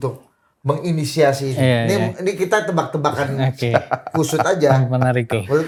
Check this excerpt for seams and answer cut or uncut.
uncut